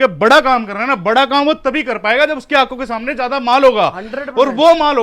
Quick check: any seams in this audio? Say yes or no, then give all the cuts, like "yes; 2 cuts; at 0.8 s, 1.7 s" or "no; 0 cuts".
no; 0 cuts